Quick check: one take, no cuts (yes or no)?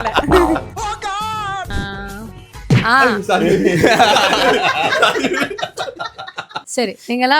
no